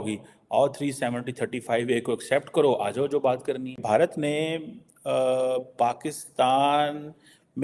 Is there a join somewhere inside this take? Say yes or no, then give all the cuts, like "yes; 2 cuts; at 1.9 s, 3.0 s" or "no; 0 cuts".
yes; 1 cut; at 3.7 s